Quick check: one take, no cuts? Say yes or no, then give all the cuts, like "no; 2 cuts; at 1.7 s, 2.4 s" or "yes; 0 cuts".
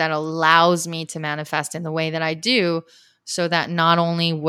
yes; 0 cuts